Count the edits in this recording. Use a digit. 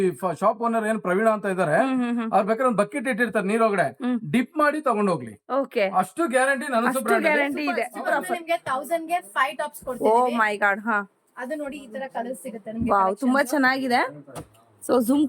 1